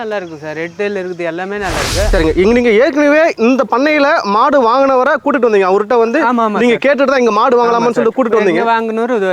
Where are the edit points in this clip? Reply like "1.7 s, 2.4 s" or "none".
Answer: 2.1 s